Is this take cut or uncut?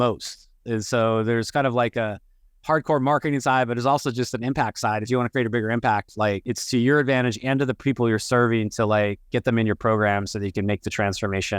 cut